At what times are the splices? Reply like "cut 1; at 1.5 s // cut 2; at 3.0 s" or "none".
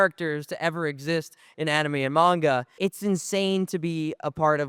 cut 1; at 2.7 s